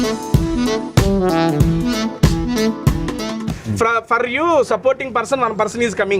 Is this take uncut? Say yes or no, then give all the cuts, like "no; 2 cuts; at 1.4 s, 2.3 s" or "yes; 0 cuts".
yes; 0 cuts